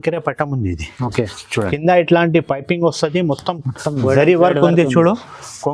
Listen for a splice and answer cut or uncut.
cut